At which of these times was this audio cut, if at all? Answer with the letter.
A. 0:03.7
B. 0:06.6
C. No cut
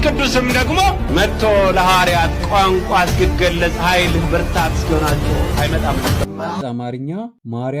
B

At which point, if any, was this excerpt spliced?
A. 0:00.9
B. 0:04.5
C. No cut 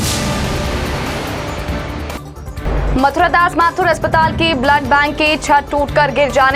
A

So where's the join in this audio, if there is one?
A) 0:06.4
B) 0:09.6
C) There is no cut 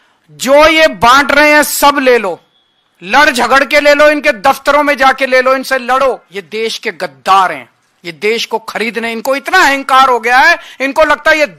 A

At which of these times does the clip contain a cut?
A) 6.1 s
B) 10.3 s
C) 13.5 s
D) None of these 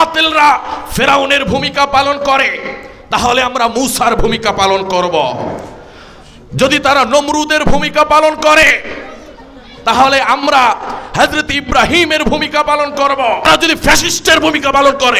C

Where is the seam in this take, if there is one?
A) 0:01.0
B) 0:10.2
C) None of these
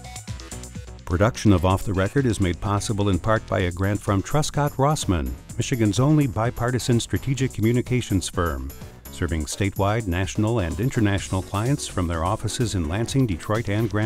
A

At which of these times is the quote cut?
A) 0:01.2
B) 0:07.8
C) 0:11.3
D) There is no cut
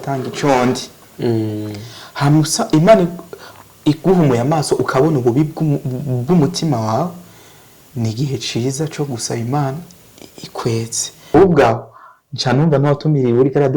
C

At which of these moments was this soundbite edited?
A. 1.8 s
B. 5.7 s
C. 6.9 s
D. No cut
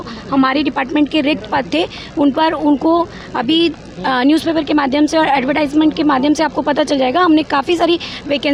D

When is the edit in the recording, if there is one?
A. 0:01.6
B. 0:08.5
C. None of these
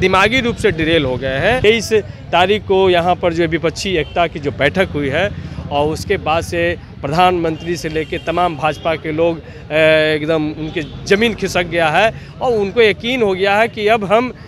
A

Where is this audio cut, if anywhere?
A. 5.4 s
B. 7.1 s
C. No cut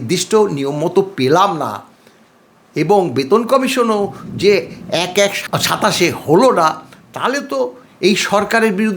A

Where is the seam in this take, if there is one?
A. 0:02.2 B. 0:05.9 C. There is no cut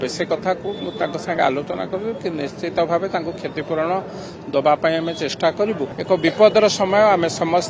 B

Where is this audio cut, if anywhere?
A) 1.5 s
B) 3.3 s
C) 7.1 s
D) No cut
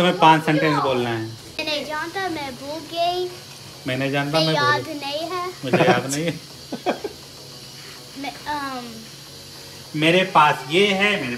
A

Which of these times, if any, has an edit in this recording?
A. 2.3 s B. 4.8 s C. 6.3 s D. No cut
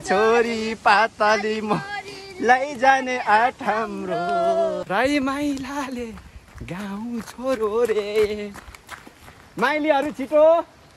B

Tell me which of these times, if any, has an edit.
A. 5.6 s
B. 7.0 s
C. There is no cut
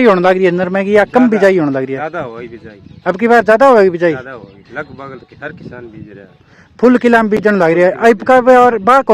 C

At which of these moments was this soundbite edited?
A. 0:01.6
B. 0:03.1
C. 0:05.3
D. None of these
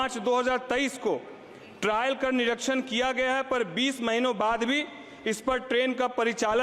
D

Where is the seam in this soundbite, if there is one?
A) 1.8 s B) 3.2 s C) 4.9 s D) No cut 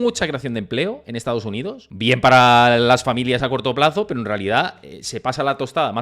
A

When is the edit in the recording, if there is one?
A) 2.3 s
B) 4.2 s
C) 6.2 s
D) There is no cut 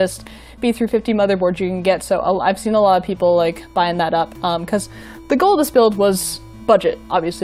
D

